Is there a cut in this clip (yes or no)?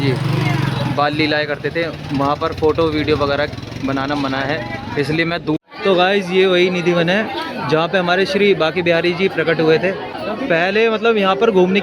yes